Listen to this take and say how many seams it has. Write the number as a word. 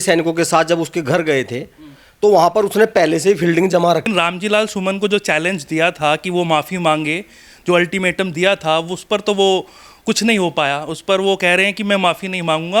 one